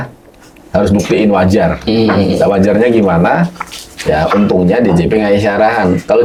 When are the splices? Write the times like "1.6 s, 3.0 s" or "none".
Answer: none